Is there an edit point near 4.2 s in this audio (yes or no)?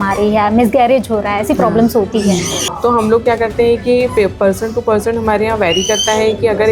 no